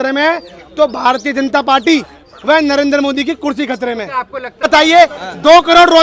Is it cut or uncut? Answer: cut